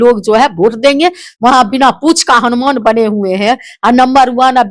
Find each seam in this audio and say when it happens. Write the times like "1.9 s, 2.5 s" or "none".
1.3 s

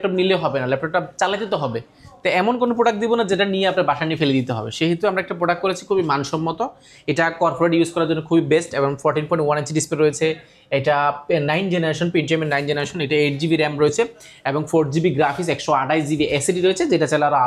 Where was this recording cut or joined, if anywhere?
none

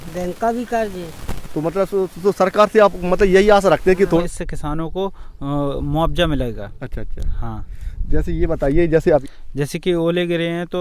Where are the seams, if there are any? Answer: 4.2 s, 9.2 s

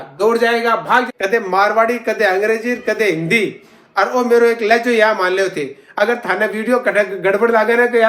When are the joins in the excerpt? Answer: 1.1 s

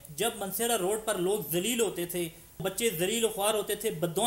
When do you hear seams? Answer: 2.6 s

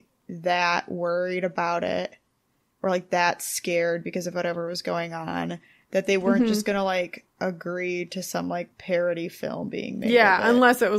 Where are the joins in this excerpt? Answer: 7.2 s, 8.8 s

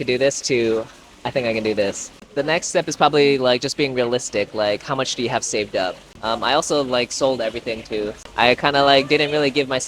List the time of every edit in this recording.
2.2 s, 6.1 s, 8.2 s

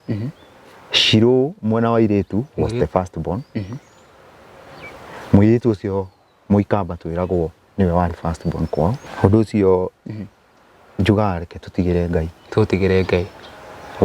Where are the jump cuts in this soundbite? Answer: 9.1 s

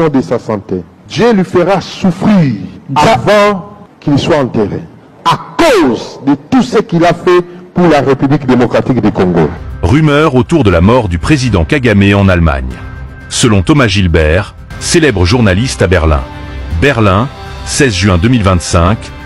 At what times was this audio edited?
9.6 s

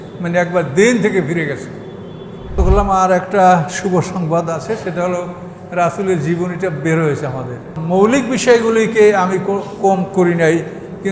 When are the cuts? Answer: 2.5 s, 7.7 s

